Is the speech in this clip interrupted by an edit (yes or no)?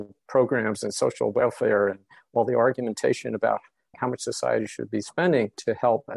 yes